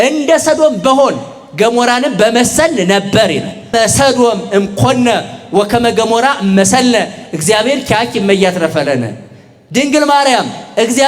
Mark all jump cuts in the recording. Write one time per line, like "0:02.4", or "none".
0:03.7